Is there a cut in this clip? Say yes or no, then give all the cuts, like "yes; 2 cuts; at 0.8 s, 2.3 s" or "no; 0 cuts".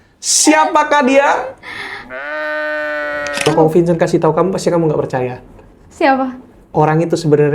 yes; 1 cut; at 3.5 s